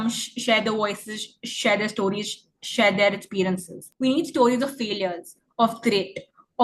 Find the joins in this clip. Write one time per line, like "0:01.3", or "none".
0:03.8